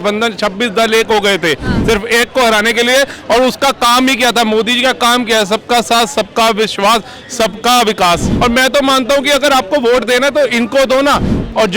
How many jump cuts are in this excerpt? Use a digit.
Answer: 1